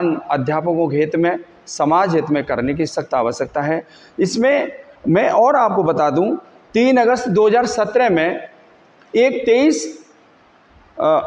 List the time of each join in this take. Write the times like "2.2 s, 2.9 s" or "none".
none